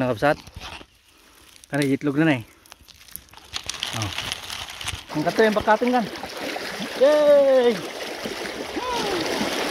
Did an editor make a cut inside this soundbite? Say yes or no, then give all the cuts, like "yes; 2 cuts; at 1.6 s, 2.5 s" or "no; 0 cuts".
yes; 1 cut; at 5.1 s